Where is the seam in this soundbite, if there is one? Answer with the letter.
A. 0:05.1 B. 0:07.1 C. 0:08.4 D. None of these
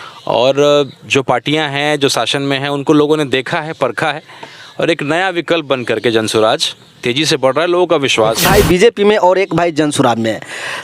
C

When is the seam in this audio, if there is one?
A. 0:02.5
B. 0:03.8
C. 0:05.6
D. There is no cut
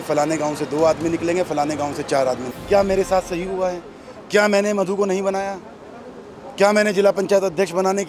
A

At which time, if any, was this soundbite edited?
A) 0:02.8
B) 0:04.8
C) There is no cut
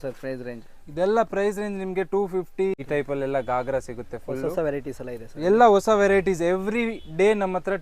A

